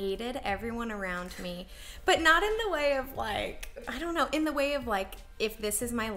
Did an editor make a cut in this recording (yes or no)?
yes